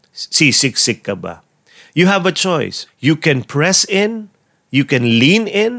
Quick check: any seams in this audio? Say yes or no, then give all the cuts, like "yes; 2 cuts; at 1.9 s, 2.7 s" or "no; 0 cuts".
yes; 1 cut; at 2.8 s